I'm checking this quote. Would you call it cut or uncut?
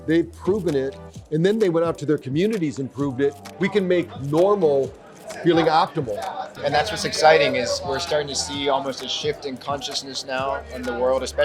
cut